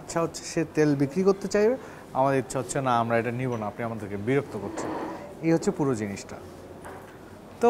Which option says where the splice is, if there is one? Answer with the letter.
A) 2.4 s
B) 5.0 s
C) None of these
C